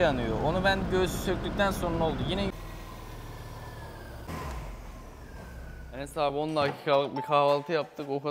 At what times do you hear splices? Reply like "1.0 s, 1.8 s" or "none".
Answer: 2.5 s

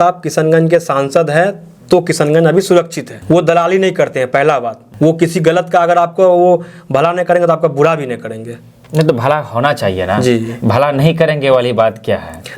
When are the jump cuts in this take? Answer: none

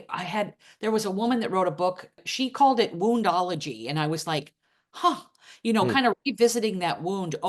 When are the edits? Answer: 2.3 s

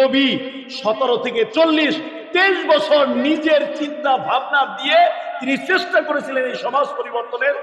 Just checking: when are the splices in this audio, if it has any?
1.5 s

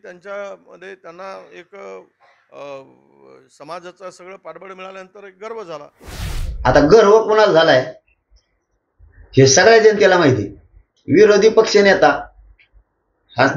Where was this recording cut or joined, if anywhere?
6.0 s

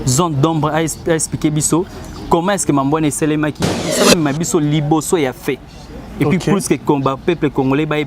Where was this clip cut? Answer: 3.9 s

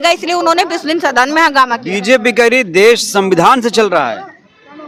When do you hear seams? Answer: none

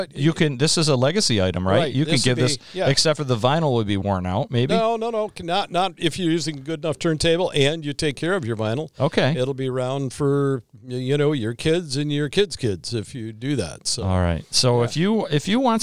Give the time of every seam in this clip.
none

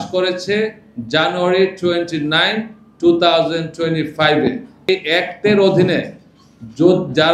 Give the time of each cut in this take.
4.9 s

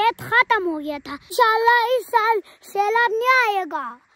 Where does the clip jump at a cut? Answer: 1.3 s

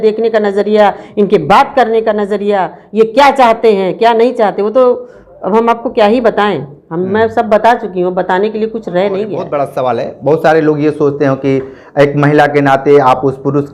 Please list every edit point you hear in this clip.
9.5 s

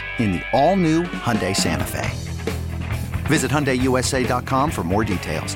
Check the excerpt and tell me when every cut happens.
none

